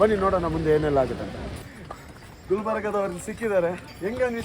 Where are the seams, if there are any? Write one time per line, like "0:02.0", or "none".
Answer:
0:02.2